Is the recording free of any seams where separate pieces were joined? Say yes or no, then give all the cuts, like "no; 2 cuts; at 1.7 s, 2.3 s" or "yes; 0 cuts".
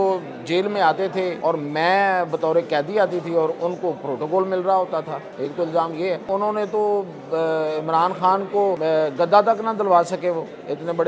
no; 4 cuts; at 1.4 s, 5.2 s, 6.2 s, 8.8 s